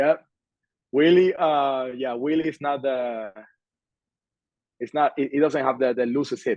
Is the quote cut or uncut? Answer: uncut